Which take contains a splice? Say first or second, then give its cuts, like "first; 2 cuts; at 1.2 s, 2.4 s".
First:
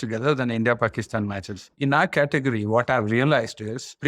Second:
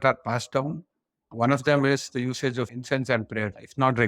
first; 1 cut; at 1.7 s